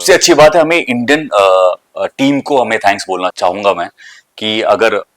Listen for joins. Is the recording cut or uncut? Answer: cut